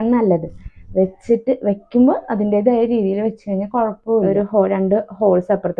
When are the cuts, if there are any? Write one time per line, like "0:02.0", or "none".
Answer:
0:04.2